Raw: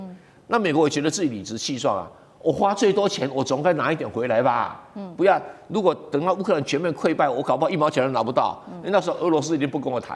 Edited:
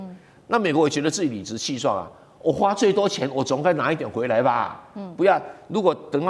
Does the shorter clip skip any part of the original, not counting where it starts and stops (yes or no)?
no